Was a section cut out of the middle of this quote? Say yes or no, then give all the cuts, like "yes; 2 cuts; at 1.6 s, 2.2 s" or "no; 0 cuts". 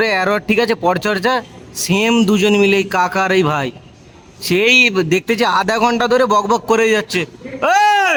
no; 0 cuts